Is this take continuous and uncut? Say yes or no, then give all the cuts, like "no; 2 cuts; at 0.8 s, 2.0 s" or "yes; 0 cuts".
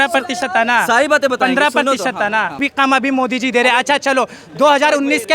no; 1 cut; at 2.6 s